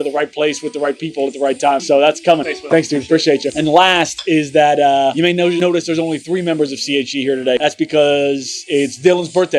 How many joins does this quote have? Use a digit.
0